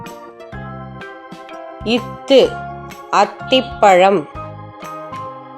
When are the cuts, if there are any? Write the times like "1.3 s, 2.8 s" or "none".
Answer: 1.2 s, 4.3 s